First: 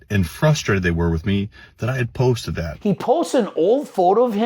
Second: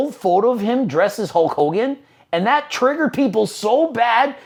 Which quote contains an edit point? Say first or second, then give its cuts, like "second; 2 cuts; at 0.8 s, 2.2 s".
first; 1 cut; at 2.7 s